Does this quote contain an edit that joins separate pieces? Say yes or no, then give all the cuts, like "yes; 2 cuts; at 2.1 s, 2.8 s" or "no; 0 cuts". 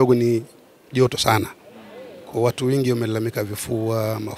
no; 0 cuts